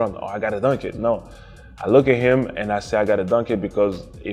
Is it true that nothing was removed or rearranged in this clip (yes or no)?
yes